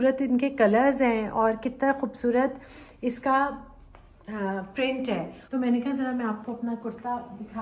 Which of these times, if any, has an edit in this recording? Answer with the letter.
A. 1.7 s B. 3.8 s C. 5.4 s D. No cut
C